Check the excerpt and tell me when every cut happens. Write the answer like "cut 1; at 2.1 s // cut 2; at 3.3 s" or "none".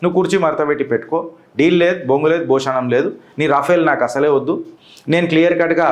none